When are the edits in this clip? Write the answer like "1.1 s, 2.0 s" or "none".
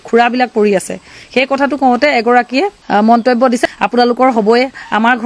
2.8 s, 3.6 s